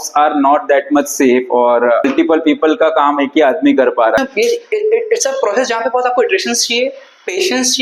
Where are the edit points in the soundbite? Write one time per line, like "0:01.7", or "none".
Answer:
0:02.1
0:04.2